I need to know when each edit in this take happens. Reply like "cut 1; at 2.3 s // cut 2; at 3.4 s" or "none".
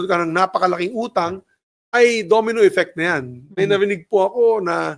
none